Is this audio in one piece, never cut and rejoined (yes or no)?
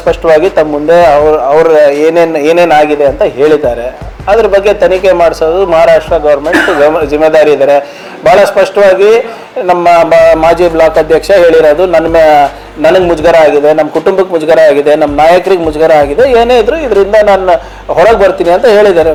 yes